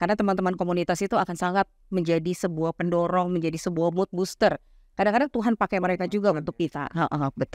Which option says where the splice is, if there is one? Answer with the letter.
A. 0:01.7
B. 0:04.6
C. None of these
C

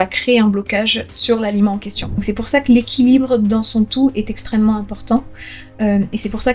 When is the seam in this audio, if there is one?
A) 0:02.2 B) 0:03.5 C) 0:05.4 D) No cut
A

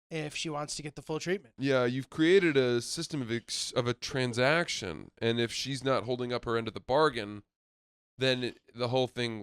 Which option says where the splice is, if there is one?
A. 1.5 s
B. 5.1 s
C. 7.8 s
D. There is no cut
A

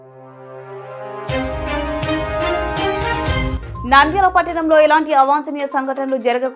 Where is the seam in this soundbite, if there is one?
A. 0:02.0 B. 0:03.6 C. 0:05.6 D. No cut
B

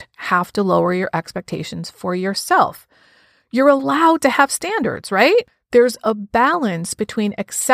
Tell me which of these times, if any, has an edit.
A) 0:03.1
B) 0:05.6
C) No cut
B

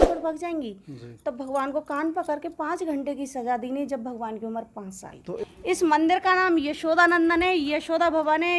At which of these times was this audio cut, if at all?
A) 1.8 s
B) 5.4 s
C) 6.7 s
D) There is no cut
B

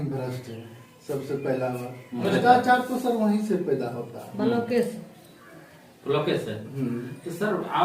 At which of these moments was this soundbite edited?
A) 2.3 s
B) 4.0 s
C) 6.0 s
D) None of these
A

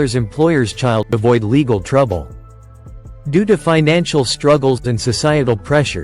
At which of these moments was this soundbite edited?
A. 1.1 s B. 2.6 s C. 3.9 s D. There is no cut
A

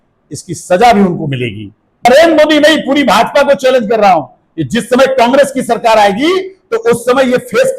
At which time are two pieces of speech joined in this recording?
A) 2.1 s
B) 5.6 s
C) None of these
A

